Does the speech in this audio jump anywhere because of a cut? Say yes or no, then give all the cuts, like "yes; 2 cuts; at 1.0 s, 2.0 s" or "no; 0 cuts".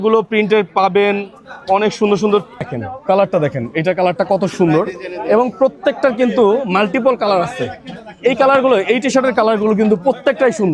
yes; 1 cut; at 2.8 s